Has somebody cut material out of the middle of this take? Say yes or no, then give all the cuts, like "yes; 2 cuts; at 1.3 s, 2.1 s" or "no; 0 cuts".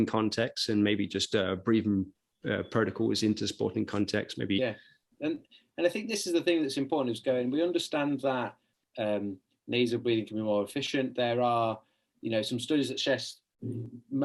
yes; 1 cut; at 4.6 s